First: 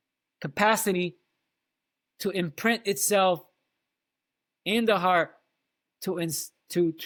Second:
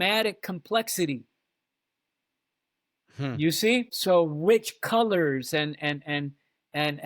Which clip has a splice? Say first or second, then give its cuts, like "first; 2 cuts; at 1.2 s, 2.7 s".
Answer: second; 1 cut; at 3.9 s